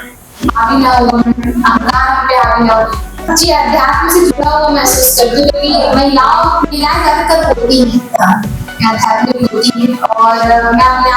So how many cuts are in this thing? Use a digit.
1